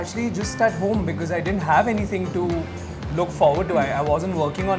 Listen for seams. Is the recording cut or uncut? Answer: uncut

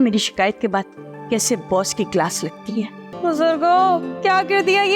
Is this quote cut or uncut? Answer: cut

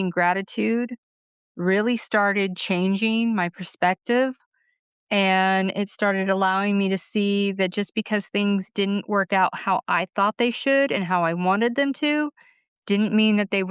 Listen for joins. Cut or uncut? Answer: uncut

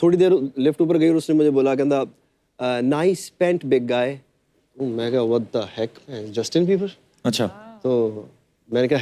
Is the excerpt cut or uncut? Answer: uncut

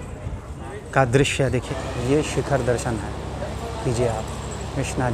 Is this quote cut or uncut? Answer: cut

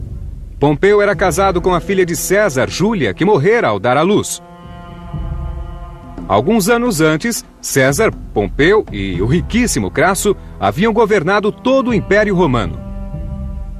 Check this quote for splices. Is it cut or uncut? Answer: cut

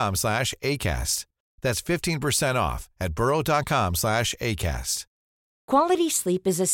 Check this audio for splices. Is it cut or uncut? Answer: uncut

